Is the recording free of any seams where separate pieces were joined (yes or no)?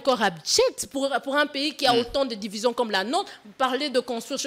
yes